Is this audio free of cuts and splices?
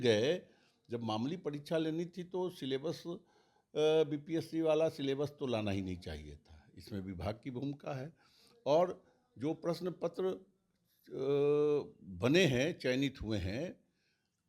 yes; 0 cuts

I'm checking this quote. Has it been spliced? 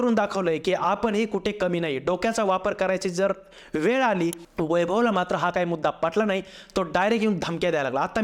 yes; 1 cut; at 4.4 s

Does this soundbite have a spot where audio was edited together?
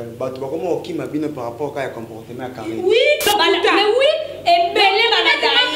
yes; 1 cut; at 3.3 s

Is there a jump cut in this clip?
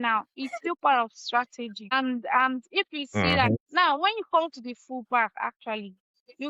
yes; 2 cuts; at 1.9 s, 3.5 s

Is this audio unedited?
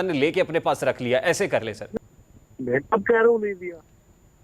no; 1 cut; at 1.8 s

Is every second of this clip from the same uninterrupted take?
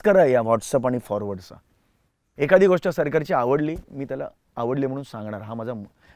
no; 1 cut; at 2.3 s

